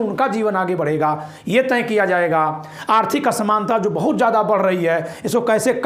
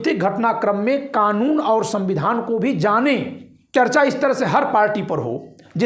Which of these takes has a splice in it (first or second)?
second